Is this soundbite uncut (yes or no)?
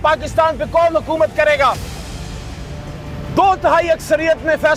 yes